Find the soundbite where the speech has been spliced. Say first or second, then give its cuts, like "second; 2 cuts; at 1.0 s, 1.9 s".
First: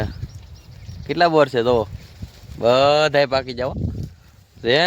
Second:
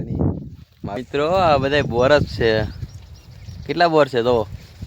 second; 1 cut; at 1.0 s